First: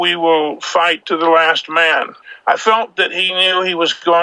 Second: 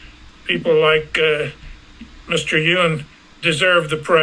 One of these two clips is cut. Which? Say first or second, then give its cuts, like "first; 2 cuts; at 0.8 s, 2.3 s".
first; 2 cuts; at 1.0 s, 2.2 s